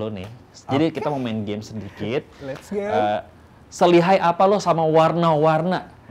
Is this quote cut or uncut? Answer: uncut